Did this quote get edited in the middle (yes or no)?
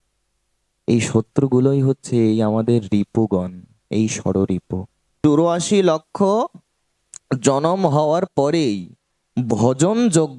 yes